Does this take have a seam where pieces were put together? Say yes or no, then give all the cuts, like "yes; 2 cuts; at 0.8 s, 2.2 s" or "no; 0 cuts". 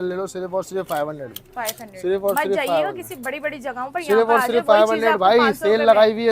no; 0 cuts